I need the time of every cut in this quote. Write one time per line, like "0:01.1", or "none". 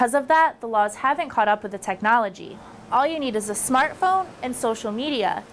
none

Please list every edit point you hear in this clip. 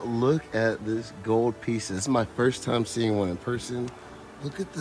none

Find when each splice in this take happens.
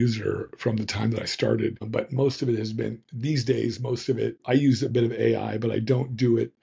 0:01.8
0:04.4

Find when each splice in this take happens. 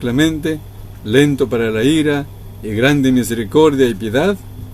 none

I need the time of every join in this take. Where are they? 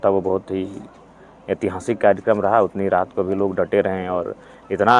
none

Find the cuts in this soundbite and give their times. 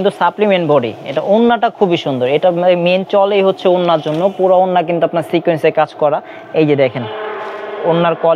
none

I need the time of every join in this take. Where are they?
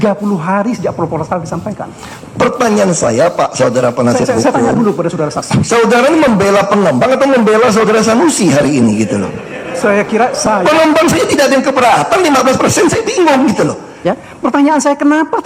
0:01.8
0:13.9

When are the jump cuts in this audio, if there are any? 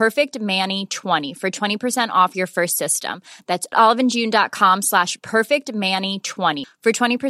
0:01.2

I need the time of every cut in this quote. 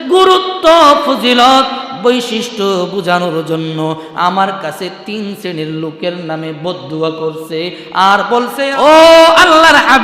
0:08.6

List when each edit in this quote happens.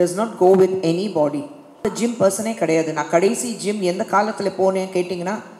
0:01.8

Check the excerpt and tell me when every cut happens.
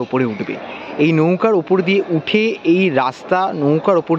none

